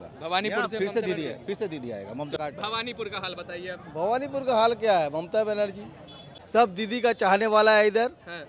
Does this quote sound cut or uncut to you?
cut